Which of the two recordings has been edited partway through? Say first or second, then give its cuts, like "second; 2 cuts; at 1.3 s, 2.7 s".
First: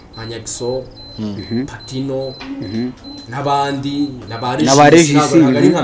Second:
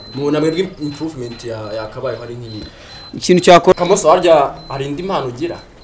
second; 1 cut; at 3.7 s